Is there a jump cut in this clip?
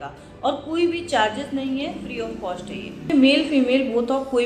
yes; 1 cut; at 3.1 s

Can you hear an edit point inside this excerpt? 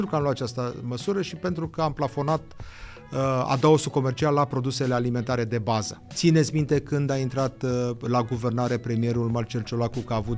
yes; 1 cut; at 6.0 s

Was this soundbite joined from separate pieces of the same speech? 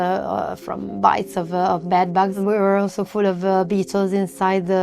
yes; 1 cut; at 2.3 s

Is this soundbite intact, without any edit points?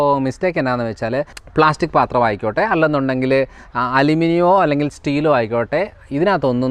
no; 1 cut; at 1.4 s

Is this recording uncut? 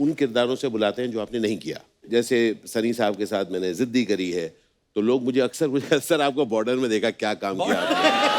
yes; 0 cuts

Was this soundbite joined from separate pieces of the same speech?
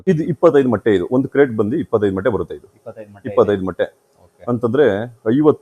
no; 0 cuts

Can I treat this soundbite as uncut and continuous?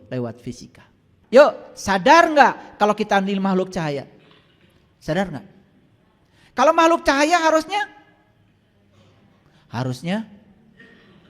no; 1 cut; at 1.1 s

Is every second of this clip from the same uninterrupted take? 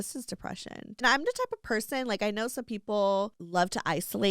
no; 2 cuts; at 1.0 s, 3.4 s

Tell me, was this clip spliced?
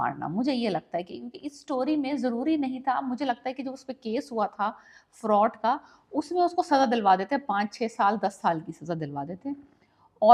no; 0 cuts

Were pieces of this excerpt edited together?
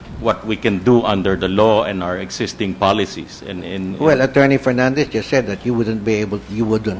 yes; 1 cut; at 3.9 s

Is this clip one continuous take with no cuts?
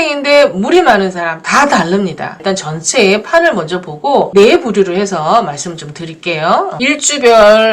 no; 2 cuts; at 2.4 s, 4.3 s

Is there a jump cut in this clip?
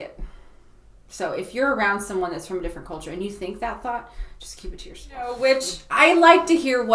yes; 1 cut; at 5.3 s

